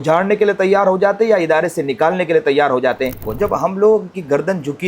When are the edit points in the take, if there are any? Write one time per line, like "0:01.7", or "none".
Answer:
0:03.3